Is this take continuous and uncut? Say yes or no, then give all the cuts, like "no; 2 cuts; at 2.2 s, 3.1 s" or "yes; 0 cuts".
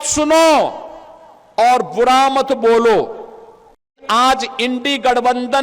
no; 1 cut; at 4.0 s